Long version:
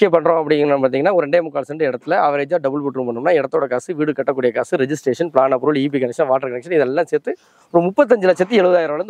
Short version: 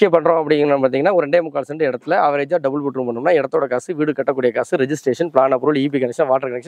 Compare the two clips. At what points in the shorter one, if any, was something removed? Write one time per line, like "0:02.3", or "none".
none

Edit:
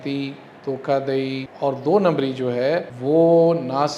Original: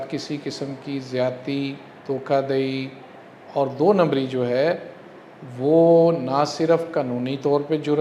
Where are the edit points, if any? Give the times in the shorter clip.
0:01.5
0:02.9

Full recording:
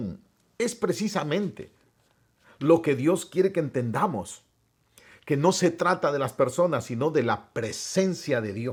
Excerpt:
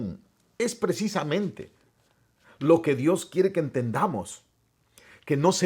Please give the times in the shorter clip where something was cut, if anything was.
none

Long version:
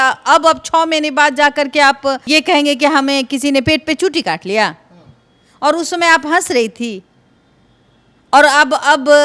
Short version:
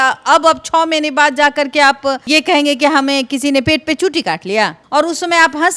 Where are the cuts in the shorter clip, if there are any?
0:04.8

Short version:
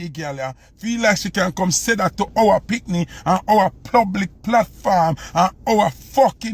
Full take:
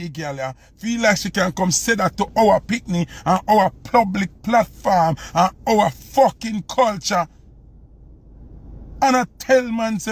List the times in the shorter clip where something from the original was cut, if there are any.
none

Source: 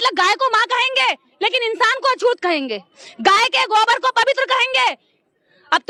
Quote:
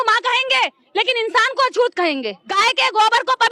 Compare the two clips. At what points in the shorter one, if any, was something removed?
0:02.6

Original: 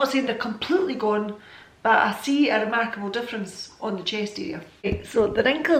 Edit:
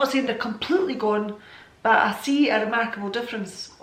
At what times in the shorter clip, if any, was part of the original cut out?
none

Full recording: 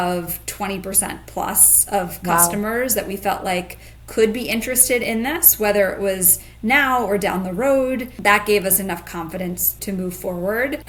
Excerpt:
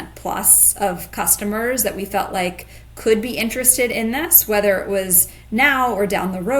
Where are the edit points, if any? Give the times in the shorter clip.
none

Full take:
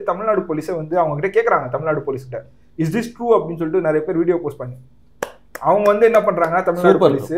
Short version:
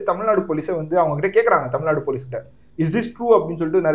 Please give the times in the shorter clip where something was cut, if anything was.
none

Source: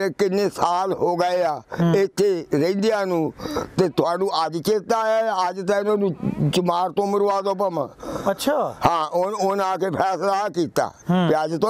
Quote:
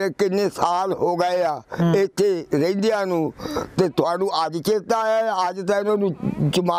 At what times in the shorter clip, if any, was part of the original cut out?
none

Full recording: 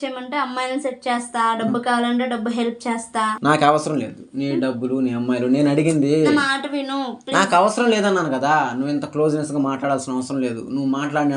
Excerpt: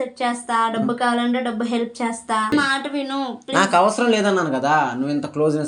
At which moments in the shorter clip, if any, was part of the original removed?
0:02.5

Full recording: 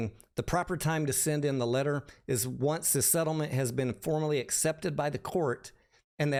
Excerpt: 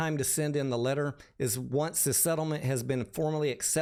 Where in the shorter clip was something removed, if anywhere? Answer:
none

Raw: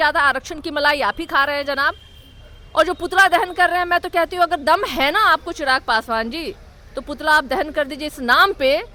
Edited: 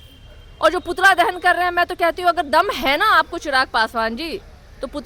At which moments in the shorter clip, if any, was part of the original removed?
none

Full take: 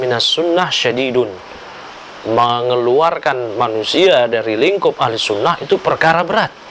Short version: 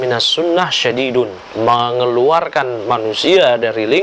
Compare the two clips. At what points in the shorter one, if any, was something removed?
0:01.4

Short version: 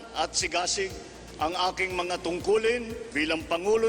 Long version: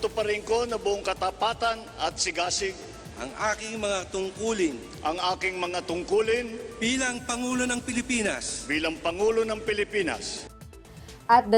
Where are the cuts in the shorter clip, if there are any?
0:01.2
0:03.0

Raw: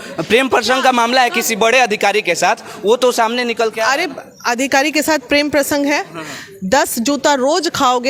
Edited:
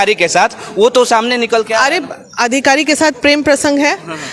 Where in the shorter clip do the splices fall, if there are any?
none

